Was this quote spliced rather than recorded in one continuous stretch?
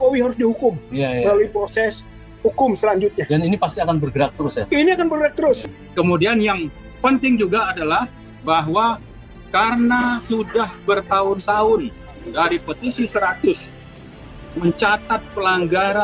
yes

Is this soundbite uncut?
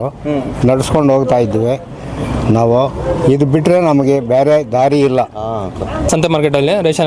no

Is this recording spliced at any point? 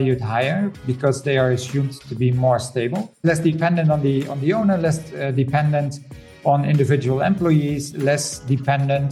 yes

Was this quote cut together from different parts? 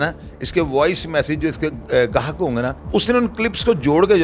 yes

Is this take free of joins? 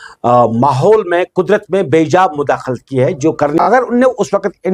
no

